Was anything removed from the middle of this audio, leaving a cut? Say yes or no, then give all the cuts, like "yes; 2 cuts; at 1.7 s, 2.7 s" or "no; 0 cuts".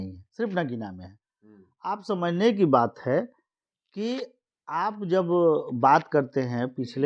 no; 0 cuts